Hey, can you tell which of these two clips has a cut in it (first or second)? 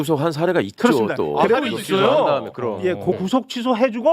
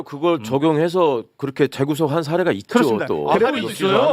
first